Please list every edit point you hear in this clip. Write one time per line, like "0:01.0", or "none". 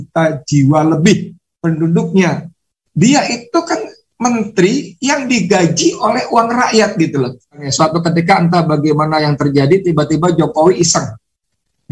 0:07.7

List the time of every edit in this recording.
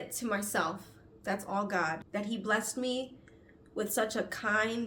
none

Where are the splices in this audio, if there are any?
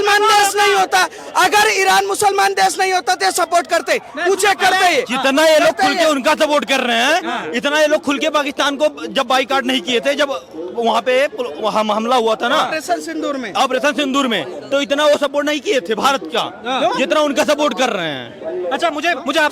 none

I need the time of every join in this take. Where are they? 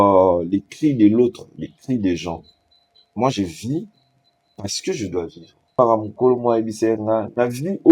0:05.7

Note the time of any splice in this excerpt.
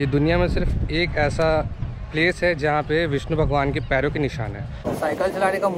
0:04.9

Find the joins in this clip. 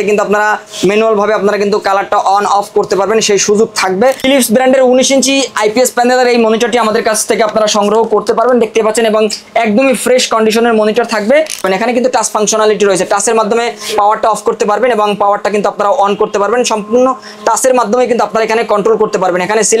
0:04.2
0:11.6

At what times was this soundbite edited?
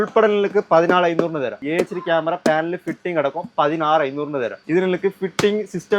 0:01.6
0:04.6

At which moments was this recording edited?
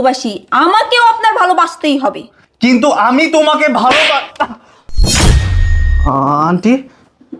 none

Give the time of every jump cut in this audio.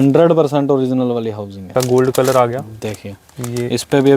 0:01.7

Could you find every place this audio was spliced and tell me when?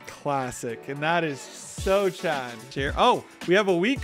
0:02.6

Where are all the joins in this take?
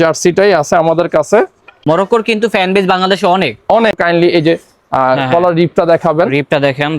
0:01.7
0:04.0

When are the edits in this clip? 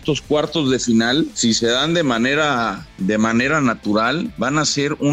0:01.3
0:02.8
0:04.3

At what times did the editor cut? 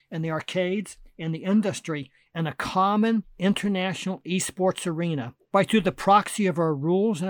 0:03.3
0:05.4

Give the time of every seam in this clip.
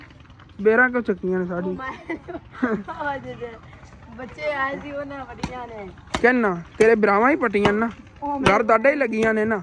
none

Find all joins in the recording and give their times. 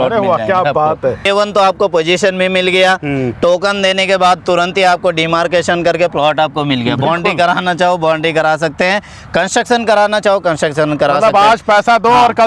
0:01.2

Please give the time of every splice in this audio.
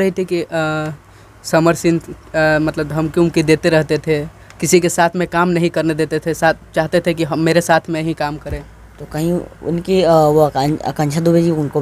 none

